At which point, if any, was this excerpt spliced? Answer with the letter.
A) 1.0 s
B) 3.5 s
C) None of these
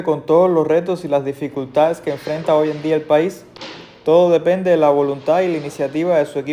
C